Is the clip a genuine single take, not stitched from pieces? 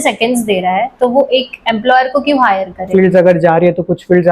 no; 1 cut; at 2.8 s

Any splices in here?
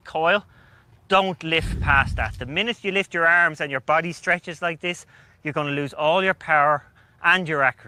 no; 0 cuts

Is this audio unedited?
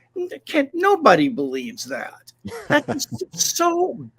yes; 0 cuts

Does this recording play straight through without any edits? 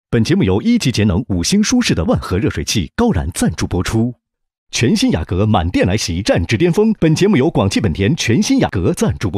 yes; 0 cuts

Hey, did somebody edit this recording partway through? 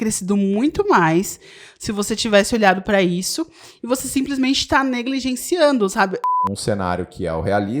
yes; 1 cut; at 6.4 s

